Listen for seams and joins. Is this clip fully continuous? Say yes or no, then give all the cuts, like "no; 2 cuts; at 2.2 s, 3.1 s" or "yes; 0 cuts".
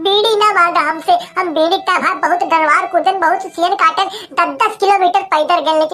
yes; 0 cuts